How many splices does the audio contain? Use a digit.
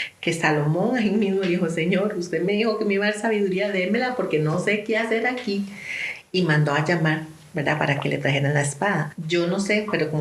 1